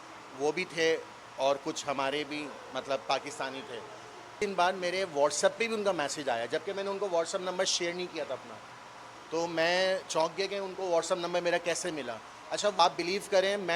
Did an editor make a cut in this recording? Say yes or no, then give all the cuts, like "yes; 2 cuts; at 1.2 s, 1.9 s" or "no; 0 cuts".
yes; 2 cuts; at 4.3 s, 12.8 s